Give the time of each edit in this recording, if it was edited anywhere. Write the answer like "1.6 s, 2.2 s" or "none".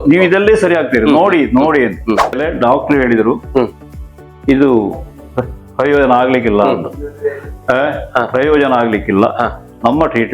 2.4 s